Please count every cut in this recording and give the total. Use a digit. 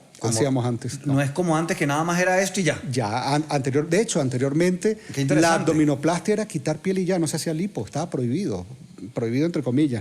0